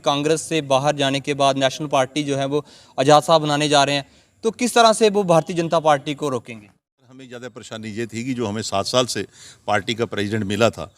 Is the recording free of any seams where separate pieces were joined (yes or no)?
no